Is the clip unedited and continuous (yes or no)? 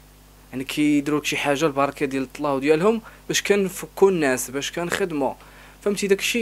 yes